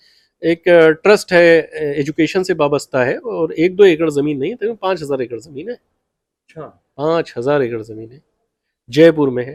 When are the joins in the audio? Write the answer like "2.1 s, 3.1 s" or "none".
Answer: none